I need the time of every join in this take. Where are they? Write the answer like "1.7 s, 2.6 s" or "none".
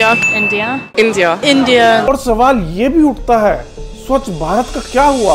2.1 s